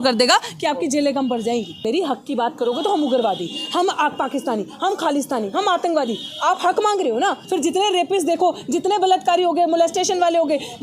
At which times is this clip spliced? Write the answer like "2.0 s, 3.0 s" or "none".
1.8 s, 7.4 s